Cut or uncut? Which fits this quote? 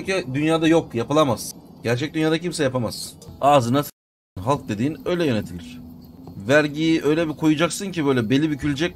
cut